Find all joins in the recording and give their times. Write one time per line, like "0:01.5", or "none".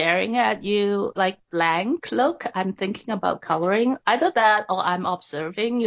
none